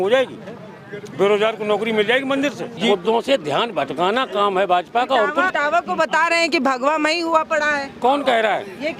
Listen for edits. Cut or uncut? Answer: cut